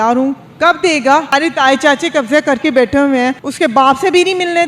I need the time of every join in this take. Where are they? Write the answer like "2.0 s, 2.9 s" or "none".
1.3 s, 3.5 s